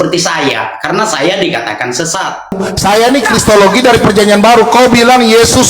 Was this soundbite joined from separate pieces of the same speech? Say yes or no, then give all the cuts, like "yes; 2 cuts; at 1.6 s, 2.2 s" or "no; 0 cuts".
yes; 1 cut; at 2.5 s